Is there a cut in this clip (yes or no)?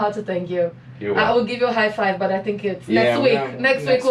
no